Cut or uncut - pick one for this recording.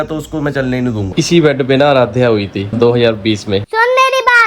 cut